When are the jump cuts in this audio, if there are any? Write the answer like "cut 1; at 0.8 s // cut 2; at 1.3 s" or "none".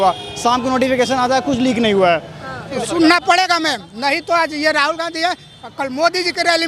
cut 1; at 2.7 s

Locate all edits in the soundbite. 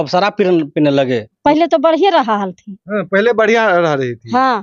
cut 1; at 1.3 s

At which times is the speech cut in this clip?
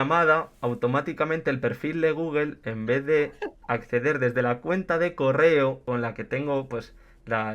cut 1; at 5.8 s

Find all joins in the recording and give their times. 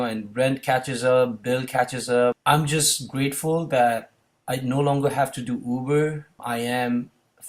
cut 1; at 2.4 s // cut 2; at 6.4 s

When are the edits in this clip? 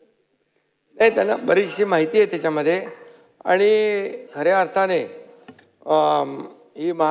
none

